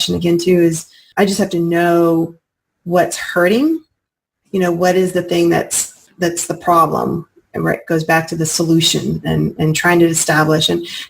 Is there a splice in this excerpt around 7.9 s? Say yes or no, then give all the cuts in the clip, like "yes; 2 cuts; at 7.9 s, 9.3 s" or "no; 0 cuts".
no; 1 cut; at 1.0 s